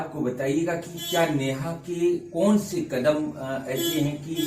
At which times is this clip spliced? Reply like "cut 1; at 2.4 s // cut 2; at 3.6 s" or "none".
none